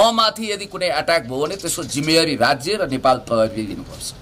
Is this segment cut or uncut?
uncut